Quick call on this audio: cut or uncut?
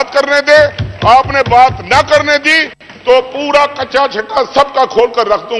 uncut